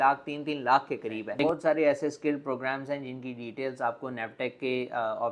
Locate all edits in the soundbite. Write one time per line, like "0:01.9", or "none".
0:01.4